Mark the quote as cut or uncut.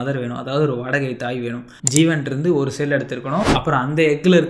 cut